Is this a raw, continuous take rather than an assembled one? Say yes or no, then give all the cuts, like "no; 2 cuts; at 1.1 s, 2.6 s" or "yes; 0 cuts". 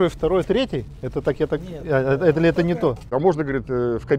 no; 1 cut; at 3.1 s